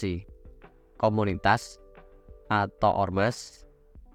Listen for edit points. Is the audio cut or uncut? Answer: uncut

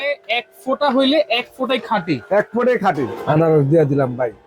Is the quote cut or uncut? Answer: cut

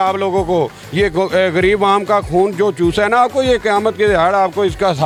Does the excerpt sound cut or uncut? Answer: uncut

